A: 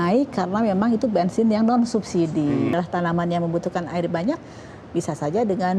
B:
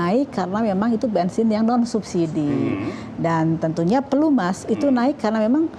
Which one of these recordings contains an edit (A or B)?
A